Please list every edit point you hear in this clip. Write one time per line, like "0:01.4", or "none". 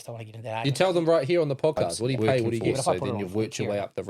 0:03.0